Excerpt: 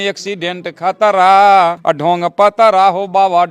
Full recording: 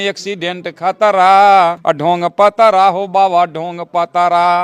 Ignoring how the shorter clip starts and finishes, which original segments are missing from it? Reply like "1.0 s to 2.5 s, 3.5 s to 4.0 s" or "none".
none